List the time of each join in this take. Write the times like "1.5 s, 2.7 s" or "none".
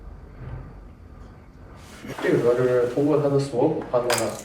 2.1 s

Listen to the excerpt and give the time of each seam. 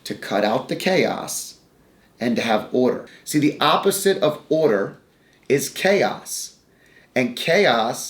3.1 s

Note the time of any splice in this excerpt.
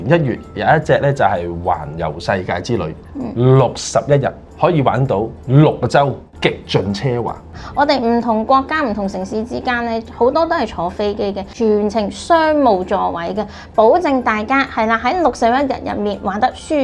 4.4 s, 5.4 s, 6.3 s, 11.5 s

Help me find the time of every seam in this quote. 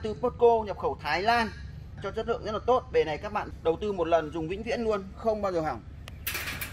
2.0 s, 3.5 s

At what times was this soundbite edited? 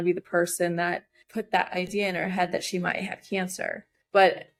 none

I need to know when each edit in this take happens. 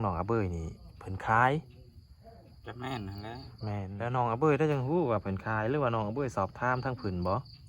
3.9 s

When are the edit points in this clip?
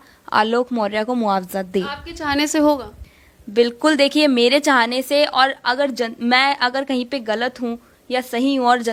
none

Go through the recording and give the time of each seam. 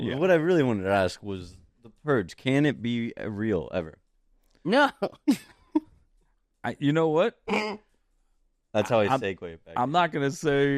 none

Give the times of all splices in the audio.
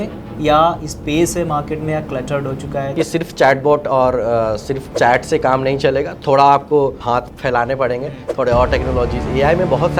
2.9 s, 4.8 s, 7.0 s

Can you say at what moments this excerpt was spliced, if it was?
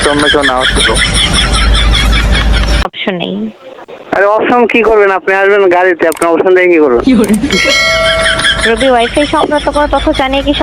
2.9 s

